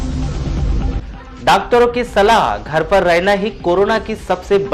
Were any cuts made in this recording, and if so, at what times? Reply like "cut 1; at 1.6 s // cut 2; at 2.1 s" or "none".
cut 1; at 1.0 s